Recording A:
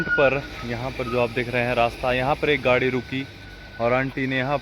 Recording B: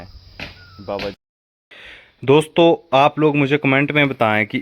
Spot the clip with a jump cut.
B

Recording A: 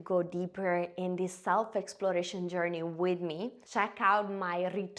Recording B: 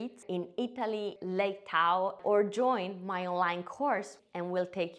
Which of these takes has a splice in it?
B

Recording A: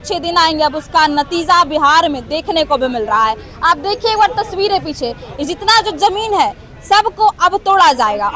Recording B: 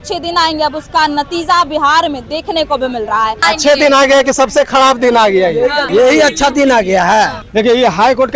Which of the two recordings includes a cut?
B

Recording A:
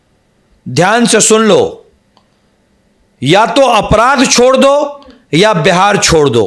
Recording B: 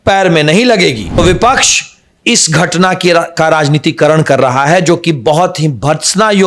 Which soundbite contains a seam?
B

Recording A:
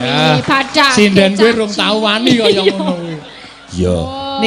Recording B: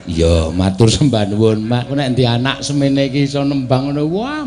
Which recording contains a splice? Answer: B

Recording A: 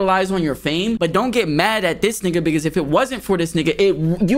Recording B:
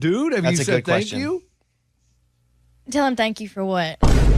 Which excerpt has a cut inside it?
A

